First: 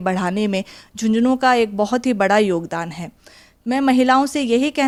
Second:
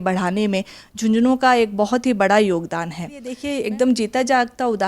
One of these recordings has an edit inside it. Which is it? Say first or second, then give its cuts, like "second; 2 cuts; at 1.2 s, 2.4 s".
second; 1 cut; at 3.4 s